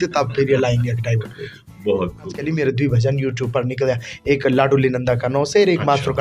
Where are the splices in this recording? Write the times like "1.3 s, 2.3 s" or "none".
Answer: 2.4 s

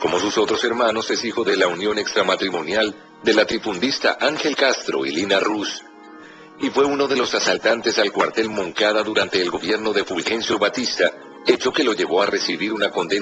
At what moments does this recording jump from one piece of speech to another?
9.1 s

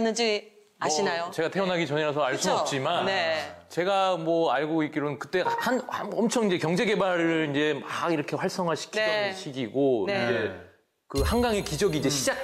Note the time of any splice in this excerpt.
none

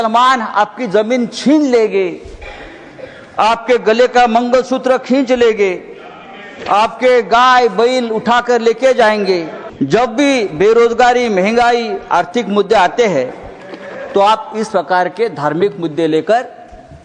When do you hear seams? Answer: 9.6 s

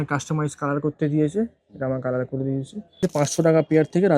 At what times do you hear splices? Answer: 3.0 s

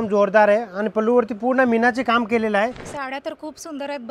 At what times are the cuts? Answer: 2.8 s

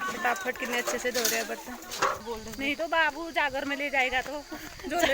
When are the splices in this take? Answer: 2.2 s

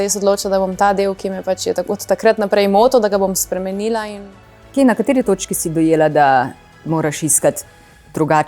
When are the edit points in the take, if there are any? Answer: 4.1 s

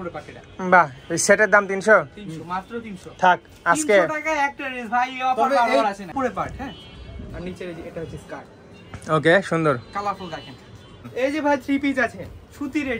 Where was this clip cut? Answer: 6.1 s, 11.0 s

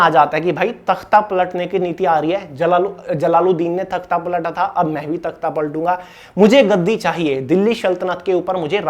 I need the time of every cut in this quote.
none

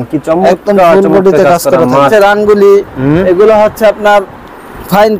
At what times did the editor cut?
2.1 s

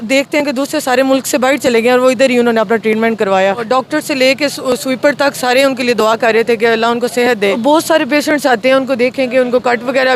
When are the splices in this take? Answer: 3.6 s, 7.6 s

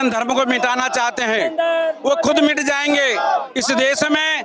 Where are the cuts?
none

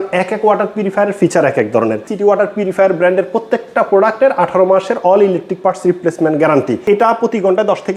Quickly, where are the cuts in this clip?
2.1 s, 6.8 s

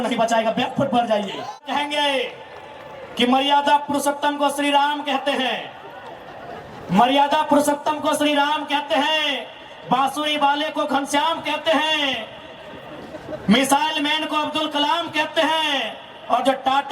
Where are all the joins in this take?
1.6 s

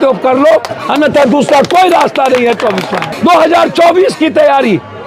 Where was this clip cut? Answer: 3.0 s

